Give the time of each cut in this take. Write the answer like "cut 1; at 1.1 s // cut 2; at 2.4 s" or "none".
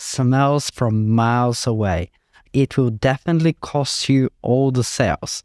cut 1; at 2.4 s